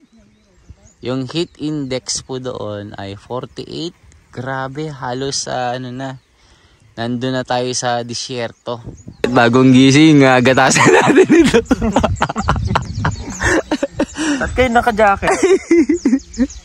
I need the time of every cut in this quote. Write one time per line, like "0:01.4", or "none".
0:09.2